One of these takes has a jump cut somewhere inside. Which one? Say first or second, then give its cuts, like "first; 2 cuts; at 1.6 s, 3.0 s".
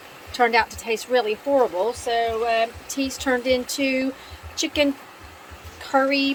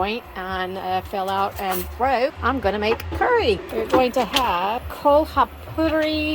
second; 3 cuts; at 2.4 s, 3.7 s, 4.9 s